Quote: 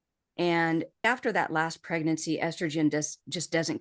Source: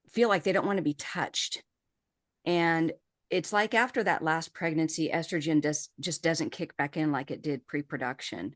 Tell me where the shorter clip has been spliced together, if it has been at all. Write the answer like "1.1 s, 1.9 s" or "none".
1.0 s